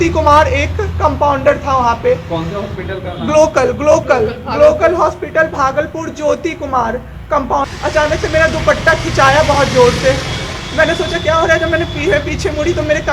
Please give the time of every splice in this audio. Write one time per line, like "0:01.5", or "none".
0:07.7